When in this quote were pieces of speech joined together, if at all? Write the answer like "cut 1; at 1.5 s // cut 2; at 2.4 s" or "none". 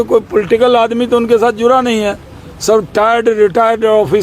none